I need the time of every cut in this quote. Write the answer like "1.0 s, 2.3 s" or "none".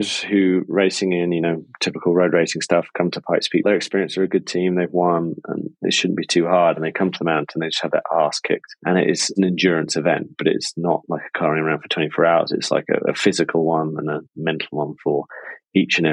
none